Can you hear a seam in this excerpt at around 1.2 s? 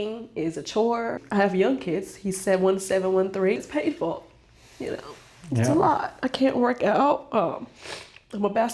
yes; 2 cuts; at 1.2 s, 3.6 s

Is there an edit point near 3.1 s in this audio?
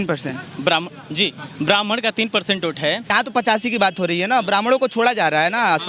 yes; 1 cut; at 3.1 s

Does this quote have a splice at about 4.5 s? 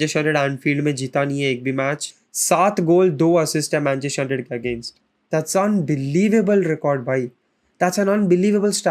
no; 1 cut; at 2.1 s

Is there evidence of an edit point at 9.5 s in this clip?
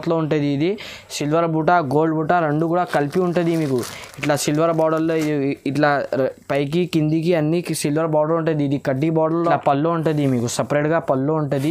yes; 1 cut; at 9.5 s

